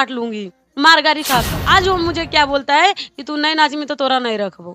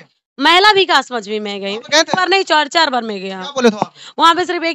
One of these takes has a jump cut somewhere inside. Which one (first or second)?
first